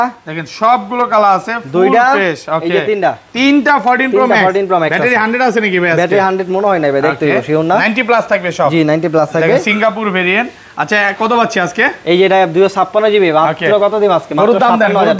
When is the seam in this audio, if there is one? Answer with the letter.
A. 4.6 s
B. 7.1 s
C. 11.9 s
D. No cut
D